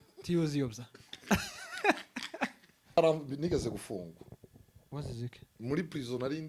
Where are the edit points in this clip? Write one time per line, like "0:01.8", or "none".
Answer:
0:03.0

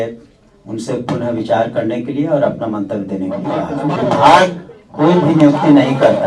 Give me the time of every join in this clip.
0:04.0

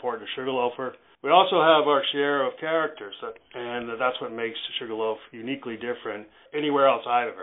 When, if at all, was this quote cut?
0:01.0
0:06.4

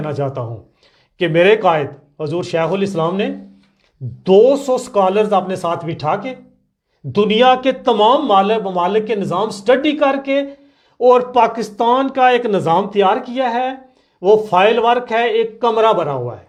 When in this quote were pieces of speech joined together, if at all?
none

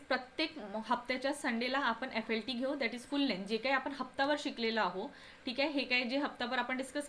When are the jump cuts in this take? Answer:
none

